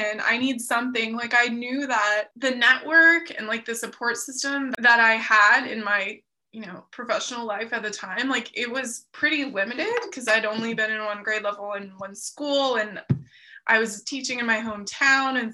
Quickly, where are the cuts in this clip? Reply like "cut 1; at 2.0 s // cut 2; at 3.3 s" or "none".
cut 1; at 2.3 s // cut 2; at 4.7 s

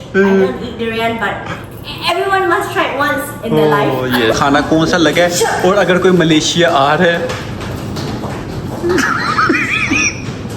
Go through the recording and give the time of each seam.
cut 1; at 4.4 s

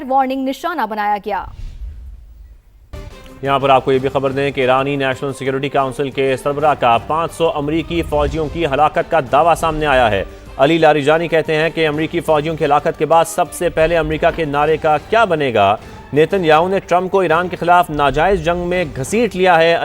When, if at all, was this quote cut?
cut 1; at 3.0 s

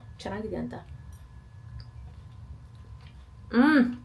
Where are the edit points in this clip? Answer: none

